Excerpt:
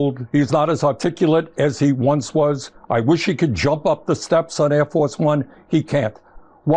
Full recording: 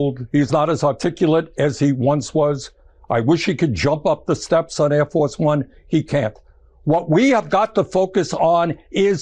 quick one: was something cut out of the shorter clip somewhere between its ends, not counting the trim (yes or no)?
yes